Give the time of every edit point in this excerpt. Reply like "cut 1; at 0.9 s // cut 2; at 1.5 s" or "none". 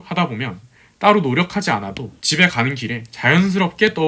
none